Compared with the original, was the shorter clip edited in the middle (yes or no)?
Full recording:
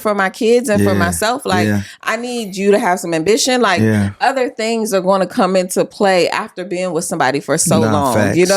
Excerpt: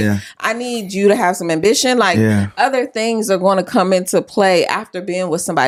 no